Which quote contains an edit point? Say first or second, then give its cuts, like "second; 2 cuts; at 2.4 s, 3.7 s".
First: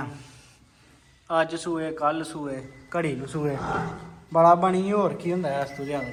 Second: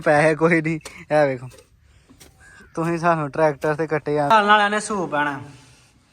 second; 1 cut; at 4.3 s